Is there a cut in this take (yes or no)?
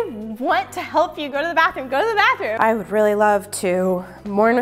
yes